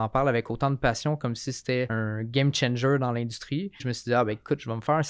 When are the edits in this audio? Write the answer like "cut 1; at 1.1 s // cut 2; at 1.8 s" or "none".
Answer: cut 1; at 1.9 s // cut 2; at 3.9 s